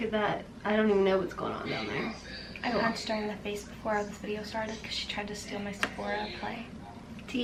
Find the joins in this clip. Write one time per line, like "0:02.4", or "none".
none